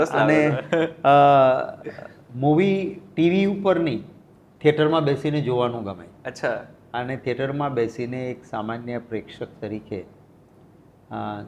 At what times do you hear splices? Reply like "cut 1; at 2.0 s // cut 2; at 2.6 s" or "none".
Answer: none